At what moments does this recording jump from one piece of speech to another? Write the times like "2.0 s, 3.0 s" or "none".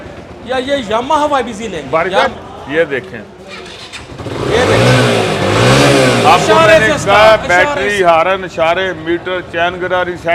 2.3 s

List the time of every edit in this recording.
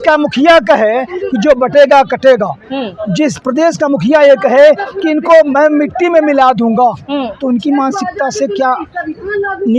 none

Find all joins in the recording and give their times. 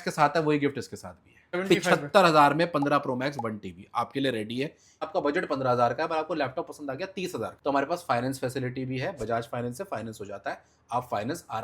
1.6 s, 5.1 s

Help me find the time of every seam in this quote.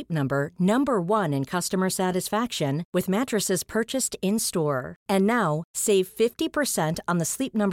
none

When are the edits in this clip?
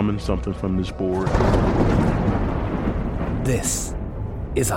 none

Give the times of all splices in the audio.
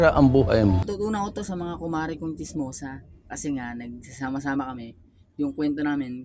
none

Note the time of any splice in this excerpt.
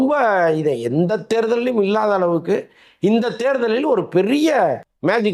none

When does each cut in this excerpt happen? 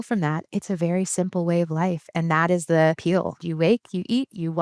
3.3 s

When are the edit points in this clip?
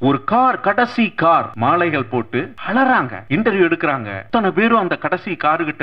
1.5 s, 2.6 s, 3.2 s, 4.1 s

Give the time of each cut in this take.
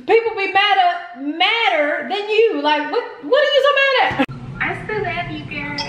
4.3 s

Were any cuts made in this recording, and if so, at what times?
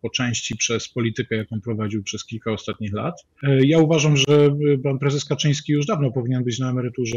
3.3 s

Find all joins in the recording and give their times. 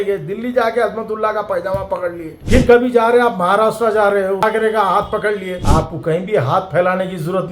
4.4 s, 5.6 s

